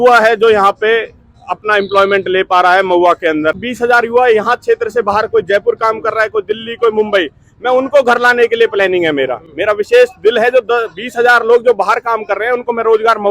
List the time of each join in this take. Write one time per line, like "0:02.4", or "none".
0:03.6